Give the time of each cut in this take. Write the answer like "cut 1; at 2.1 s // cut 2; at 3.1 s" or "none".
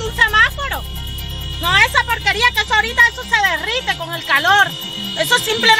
none